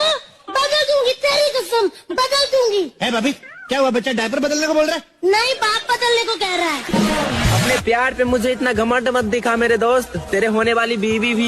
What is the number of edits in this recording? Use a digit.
1